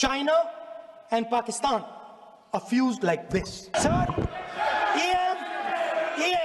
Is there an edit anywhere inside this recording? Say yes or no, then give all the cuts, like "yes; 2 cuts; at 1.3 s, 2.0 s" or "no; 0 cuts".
yes; 1 cut; at 3.7 s